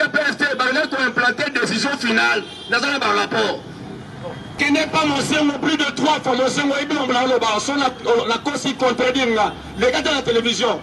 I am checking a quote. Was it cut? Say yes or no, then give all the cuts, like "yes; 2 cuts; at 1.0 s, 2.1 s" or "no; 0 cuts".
yes; 1 cut; at 4.6 s